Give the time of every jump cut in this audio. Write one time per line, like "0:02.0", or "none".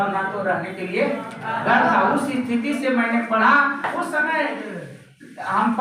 0:03.9